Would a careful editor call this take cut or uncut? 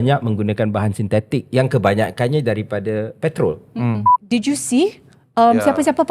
cut